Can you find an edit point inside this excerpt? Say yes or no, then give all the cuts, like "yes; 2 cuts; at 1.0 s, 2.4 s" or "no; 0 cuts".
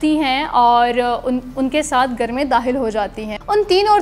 no; 0 cuts